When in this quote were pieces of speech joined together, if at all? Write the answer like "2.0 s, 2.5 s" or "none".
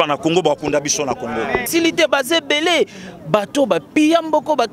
1.7 s